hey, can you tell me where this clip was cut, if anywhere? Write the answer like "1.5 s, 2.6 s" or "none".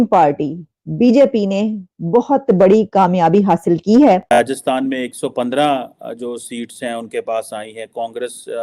4.4 s